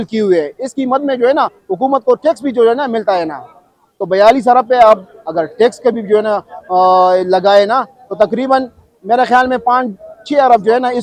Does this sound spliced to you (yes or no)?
no